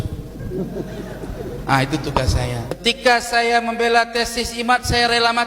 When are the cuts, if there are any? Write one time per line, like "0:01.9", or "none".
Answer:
0:02.8